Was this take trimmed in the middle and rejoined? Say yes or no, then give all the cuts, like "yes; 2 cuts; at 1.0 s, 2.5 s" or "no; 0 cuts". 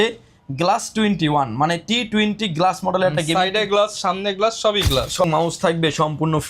yes; 1 cut; at 5.2 s